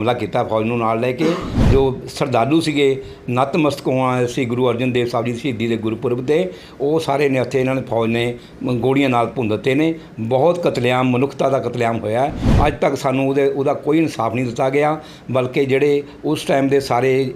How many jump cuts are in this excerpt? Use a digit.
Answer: 2